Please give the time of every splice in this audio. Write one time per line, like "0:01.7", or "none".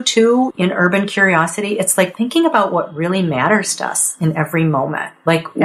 none